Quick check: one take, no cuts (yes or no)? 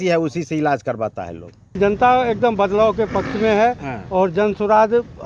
no